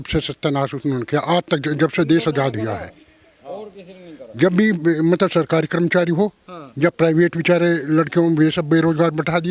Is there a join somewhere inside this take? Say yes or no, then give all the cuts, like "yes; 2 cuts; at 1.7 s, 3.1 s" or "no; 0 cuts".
no; 0 cuts